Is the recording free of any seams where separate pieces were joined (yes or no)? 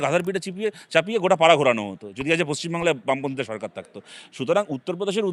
yes